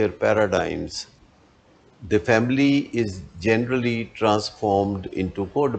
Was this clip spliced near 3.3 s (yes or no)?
no